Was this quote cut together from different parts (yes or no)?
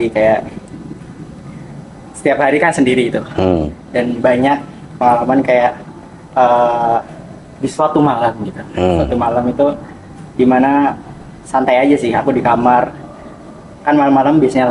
no